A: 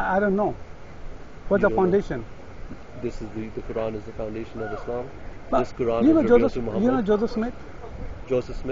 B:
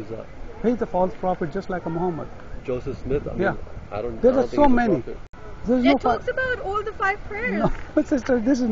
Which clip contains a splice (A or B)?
B